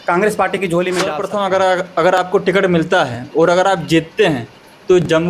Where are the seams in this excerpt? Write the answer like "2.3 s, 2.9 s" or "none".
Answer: 1.2 s